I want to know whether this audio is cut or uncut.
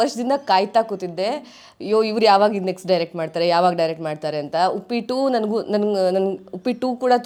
uncut